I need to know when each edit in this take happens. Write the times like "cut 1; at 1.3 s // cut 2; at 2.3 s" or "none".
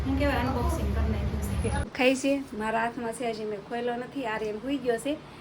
cut 1; at 1.9 s